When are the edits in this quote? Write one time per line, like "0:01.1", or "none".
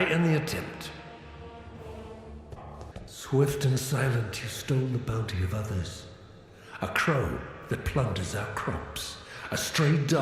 0:02.9